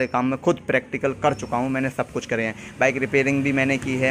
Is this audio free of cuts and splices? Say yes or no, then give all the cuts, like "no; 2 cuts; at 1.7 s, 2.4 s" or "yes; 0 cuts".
yes; 0 cuts